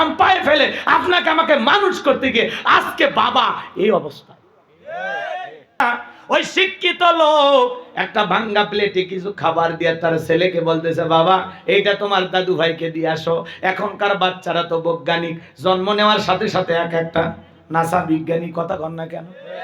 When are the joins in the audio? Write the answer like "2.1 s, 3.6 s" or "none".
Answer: 5.8 s